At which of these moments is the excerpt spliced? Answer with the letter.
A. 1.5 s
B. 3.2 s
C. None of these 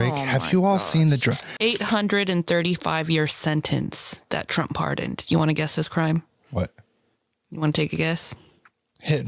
A